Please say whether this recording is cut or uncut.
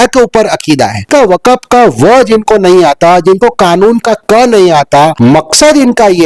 cut